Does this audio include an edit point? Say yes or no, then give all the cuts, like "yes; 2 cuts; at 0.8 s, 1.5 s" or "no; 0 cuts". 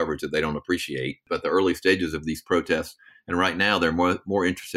yes; 1 cut; at 1.2 s